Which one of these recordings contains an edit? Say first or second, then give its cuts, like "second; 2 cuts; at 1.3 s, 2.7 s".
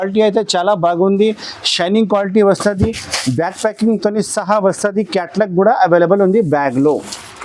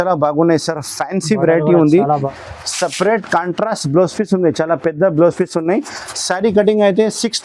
second; 1 cut; at 2.3 s